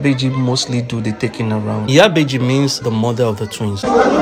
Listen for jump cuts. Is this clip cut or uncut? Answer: uncut